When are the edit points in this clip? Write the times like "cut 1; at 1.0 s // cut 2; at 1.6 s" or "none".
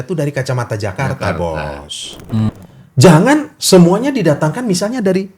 cut 1; at 2.5 s

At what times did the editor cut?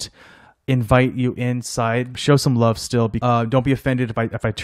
cut 1; at 2.1 s // cut 2; at 3.2 s

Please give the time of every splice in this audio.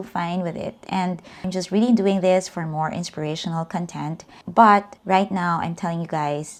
none

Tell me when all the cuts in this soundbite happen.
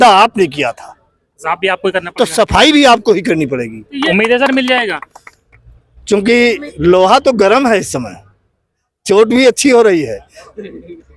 cut 1; at 3.9 s

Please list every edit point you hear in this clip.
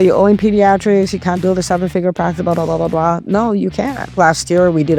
cut 1; at 1.4 s // cut 2; at 4.1 s

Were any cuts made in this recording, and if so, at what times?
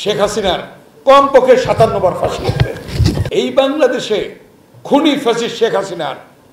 cut 1; at 3.2 s

